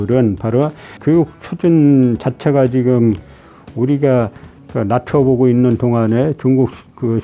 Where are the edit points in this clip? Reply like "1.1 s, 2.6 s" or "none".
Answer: 0.9 s